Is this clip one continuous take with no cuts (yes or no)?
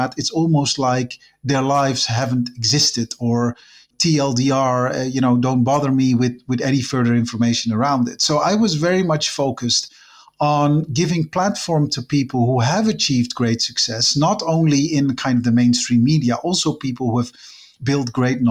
no